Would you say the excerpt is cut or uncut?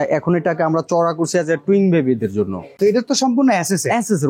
cut